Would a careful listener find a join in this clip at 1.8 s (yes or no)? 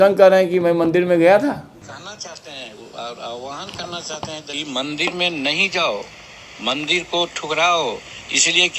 yes